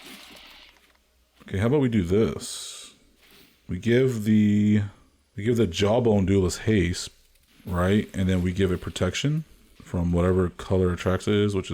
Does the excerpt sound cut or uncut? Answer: uncut